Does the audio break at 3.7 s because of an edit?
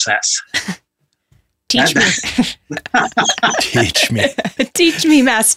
no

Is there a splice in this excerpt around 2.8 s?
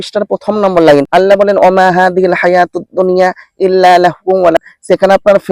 no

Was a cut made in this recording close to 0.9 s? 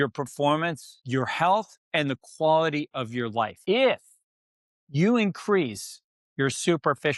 yes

